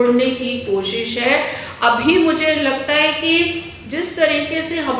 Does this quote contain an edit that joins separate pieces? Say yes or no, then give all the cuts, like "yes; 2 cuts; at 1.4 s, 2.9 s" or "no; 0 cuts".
no; 0 cuts